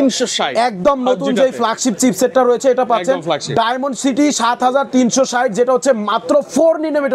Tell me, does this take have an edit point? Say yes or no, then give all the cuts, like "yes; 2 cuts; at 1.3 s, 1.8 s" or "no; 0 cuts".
no; 0 cuts